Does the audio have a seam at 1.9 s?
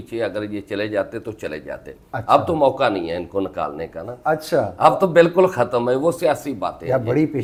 no; 0 cuts

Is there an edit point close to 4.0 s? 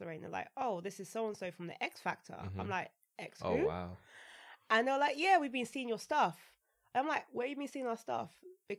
no; 0 cuts

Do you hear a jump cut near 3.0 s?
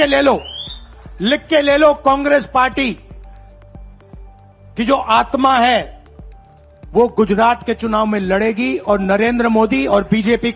no; 0 cuts

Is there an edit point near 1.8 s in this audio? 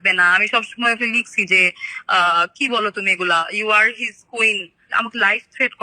no; 1 cut; at 4.9 s

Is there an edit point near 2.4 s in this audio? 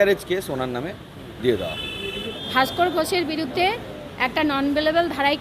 yes; 1 cut; at 2.4 s

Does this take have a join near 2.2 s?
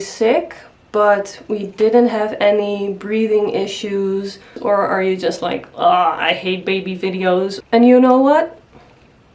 no; 2 cuts; at 4.6 s, 7.6 s

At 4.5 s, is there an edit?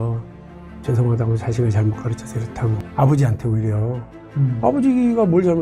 no; 1 cut; at 2.8 s

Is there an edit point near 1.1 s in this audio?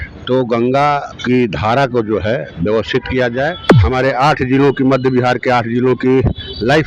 yes; 2 cuts; at 1.1 s, 3.7 s

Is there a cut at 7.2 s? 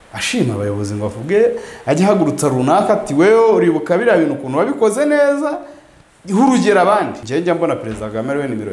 yes; 1 cut; at 7.2 s

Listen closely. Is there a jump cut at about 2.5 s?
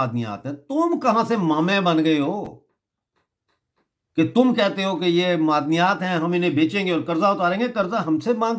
no; 0 cuts

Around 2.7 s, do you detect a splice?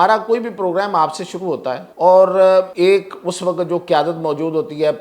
yes; 2 cuts; at 1.9 s, 2.7 s

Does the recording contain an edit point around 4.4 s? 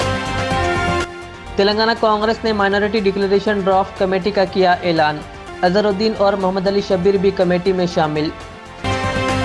no; 1 cut; at 1.2 s

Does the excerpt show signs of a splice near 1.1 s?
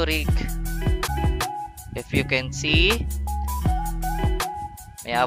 yes; 1 cut; at 1.1 s

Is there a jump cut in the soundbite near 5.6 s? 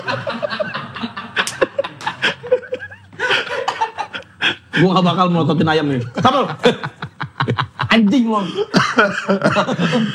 no; 0 cuts

